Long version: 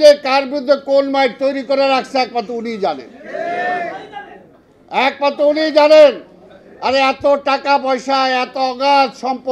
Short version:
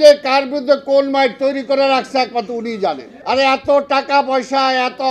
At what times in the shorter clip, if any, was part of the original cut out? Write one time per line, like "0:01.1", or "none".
0:03.1